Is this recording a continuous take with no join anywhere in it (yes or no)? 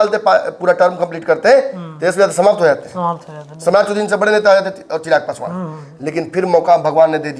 yes